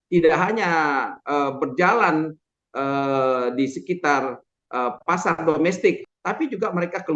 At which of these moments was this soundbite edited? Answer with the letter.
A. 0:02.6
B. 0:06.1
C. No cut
B